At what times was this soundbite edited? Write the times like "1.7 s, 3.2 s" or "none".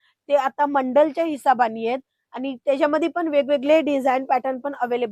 none